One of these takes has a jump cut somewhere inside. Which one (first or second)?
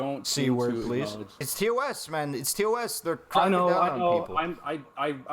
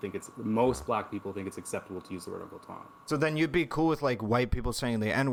first